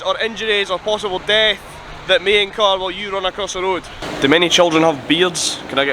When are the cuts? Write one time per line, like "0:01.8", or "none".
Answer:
0:04.0